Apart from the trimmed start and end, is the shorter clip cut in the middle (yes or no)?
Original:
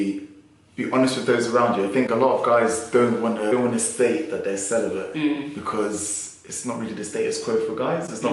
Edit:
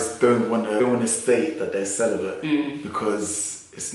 no